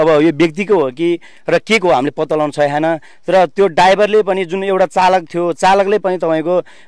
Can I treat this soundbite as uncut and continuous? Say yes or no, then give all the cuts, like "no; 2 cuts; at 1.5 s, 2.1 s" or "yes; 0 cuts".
yes; 0 cuts